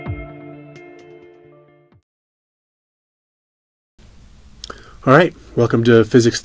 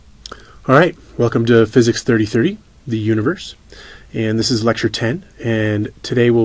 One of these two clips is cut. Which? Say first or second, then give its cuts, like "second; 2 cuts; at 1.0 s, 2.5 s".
second; 1 cut; at 4.5 s